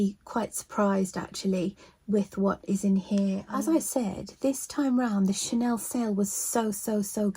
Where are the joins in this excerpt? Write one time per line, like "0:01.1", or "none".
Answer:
0:03.4